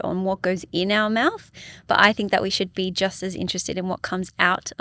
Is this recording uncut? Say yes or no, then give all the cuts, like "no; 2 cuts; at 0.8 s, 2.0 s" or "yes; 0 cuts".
yes; 0 cuts